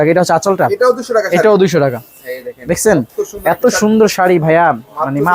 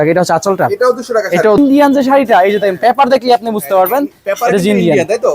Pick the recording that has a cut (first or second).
second